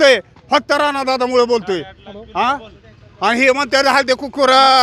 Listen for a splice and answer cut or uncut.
uncut